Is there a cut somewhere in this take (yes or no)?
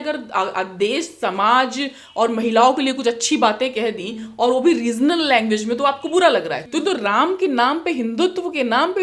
yes